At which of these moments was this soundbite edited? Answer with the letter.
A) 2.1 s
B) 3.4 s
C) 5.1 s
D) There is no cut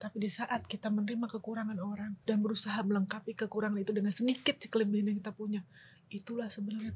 A